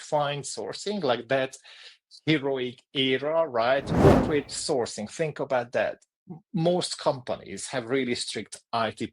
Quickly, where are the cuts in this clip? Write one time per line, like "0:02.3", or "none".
0:03.9